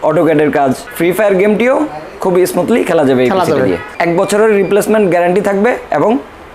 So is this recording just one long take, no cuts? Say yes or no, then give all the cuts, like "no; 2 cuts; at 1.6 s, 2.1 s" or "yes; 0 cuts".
no; 2 cuts; at 0.9 s, 3.9 s